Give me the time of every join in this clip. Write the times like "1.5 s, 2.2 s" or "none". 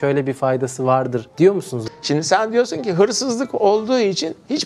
1.8 s